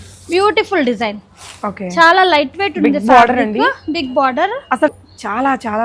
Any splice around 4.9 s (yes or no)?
yes